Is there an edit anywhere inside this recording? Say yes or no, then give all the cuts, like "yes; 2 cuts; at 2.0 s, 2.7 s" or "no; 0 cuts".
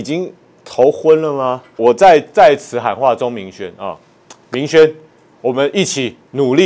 yes; 1 cut; at 1.8 s